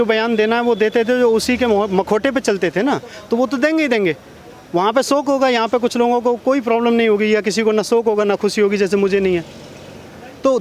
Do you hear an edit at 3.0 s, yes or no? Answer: no